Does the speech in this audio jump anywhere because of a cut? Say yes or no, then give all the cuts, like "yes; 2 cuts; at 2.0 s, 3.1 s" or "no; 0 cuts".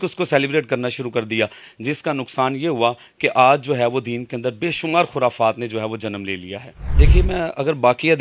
no; 0 cuts